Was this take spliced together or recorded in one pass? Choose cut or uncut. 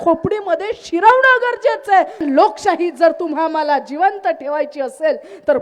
cut